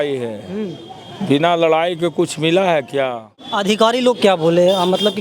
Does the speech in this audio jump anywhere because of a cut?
yes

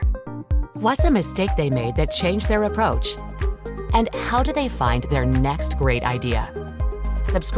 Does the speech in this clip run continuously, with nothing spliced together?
yes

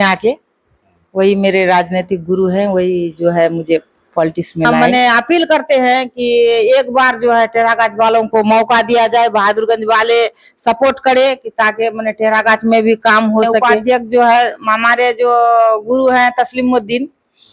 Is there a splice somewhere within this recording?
yes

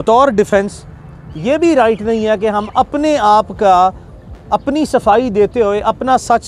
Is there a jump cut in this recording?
no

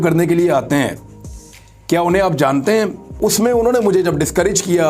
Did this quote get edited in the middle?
yes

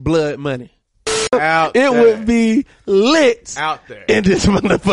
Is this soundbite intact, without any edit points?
no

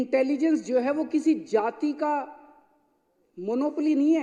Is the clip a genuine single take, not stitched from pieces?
yes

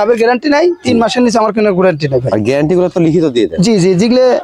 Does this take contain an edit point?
no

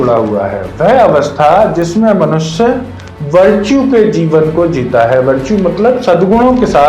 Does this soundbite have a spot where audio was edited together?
no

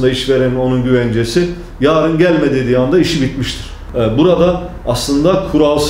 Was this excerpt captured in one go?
no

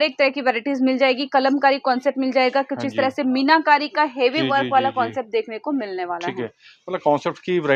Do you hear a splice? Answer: no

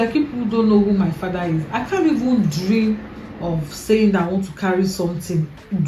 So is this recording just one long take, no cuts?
yes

